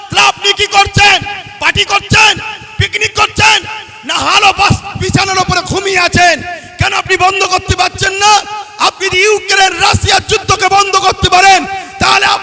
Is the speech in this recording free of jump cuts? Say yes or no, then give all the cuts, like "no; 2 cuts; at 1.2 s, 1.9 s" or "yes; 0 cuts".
yes; 0 cuts